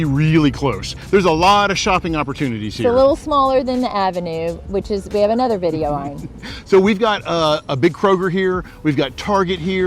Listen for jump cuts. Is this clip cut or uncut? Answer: uncut